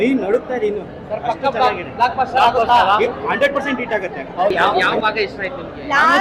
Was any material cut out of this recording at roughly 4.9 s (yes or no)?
yes